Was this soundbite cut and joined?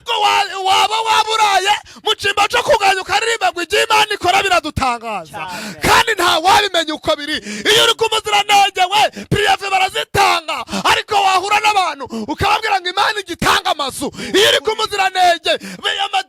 no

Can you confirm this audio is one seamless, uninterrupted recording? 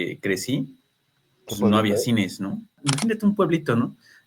no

